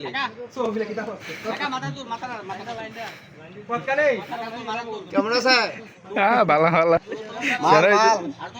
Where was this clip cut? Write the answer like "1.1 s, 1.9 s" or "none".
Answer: 7.0 s